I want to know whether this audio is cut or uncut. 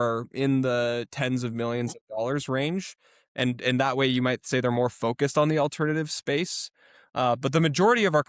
uncut